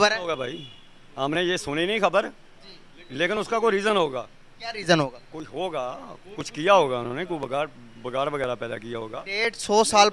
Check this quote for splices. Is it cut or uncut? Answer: uncut